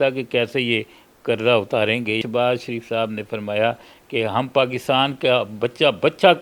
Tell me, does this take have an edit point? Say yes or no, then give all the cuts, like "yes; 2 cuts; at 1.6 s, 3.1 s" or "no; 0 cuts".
yes; 1 cut; at 2.2 s